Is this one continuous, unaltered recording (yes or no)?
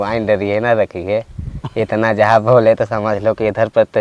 yes